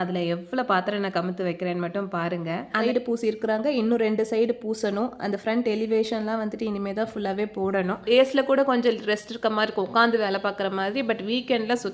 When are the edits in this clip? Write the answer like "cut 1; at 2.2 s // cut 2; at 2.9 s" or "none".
cut 1; at 2.8 s // cut 2; at 8.0 s